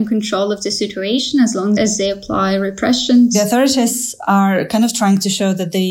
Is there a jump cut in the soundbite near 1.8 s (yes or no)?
yes